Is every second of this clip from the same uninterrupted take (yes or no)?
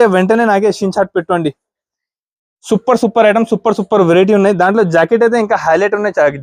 yes